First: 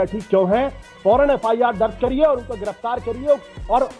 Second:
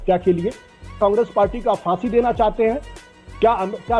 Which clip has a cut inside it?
second; 1 cut; at 1.0 s

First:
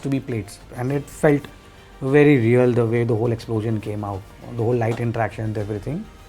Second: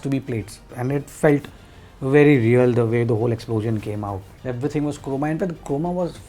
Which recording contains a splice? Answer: second; 1 cut; at 4.3 s

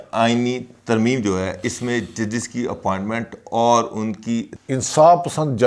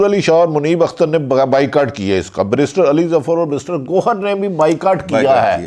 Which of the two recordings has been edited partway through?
first; 1 cut; at 4.6 s

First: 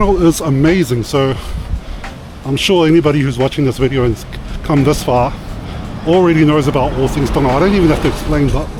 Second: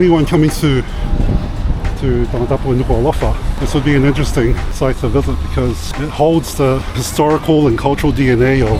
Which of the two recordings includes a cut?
second; 4 cuts; at 3.5 s, 4.7 s, 5.9 s, 7.0 s

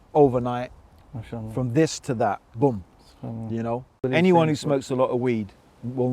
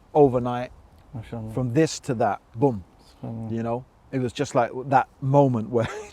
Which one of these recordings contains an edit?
first; 1 cut; at 4.1 s

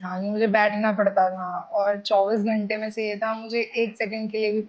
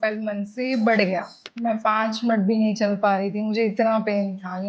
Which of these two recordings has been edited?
second; 1 cut; at 1.4 s

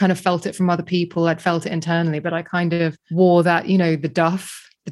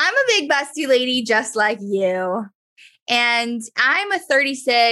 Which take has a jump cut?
first; 1 cut; at 3.0 s

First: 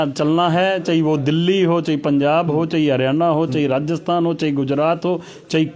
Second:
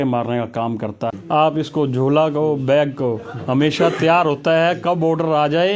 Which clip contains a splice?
second; 1 cut; at 1.1 s

